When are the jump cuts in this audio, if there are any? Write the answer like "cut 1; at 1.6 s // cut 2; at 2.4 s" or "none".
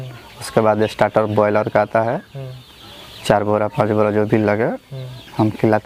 none